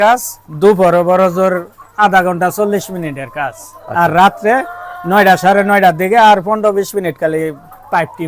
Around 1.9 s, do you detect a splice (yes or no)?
no